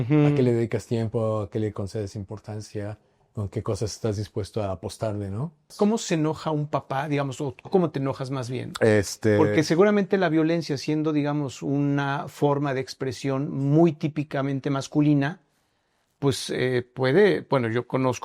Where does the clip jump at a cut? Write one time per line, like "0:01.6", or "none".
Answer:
0:05.7